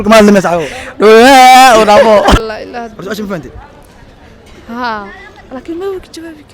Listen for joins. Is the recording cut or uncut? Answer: cut